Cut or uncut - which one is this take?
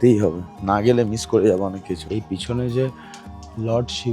cut